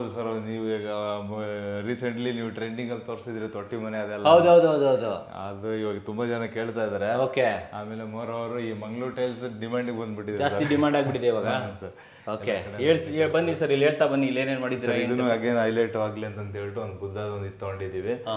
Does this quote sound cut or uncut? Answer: uncut